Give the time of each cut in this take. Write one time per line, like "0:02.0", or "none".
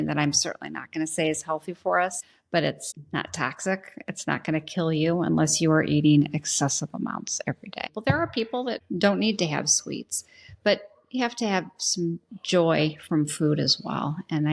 0:02.3
0:02.9
0:07.9
0:08.8